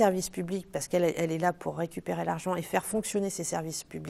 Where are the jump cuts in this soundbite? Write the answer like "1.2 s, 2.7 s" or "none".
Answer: none